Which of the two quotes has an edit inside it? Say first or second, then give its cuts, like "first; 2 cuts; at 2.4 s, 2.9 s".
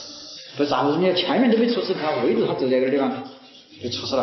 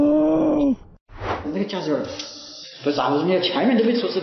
second; 1 cut; at 1.3 s